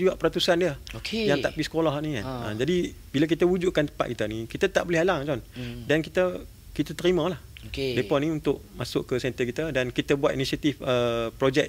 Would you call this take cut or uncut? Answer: uncut